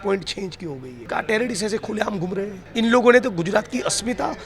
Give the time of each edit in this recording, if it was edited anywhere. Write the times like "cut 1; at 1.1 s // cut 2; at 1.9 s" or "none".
cut 1; at 0.9 s // cut 2; at 2.6 s